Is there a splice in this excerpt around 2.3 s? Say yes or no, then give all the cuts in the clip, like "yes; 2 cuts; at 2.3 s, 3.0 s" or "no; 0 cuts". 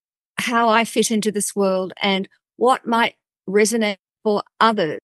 no; 1 cut; at 4.1 s